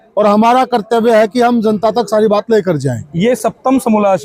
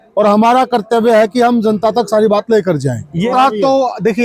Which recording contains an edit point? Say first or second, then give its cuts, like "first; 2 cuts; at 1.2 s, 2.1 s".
second; 1 cut; at 3.3 s